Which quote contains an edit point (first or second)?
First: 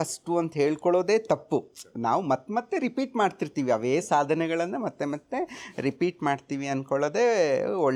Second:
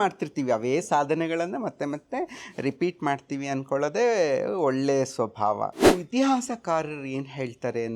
second